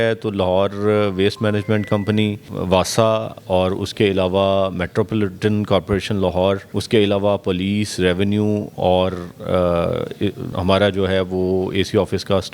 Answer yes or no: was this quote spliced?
yes